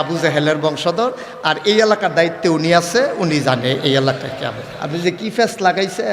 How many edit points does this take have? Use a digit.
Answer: 1